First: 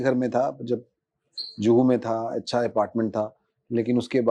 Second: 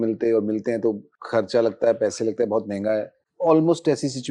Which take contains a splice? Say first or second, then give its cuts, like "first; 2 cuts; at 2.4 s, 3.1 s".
second; 2 cuts; at 1.1 s, 3.2 s